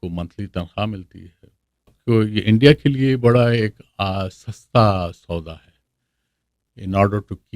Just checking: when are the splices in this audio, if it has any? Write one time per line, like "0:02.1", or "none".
0:02.0